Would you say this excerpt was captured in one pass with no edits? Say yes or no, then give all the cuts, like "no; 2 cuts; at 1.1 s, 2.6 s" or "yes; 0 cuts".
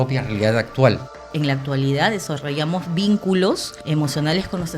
no; 2 cuts; at 1.2 s, 3.7 s